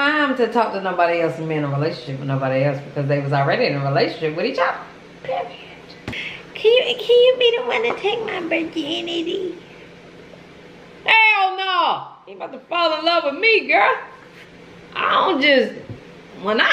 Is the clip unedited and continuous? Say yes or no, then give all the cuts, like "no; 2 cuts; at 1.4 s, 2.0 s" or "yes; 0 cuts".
no; 1 cut; at 5.9 s